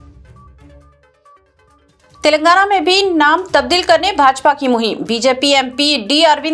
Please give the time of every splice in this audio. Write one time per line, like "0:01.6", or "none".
0:01.8